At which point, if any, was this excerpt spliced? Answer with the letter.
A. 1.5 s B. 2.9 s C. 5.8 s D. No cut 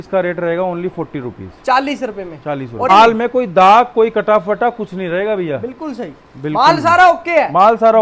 B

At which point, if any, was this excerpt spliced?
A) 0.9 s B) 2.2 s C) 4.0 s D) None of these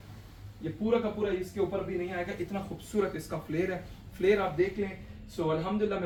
D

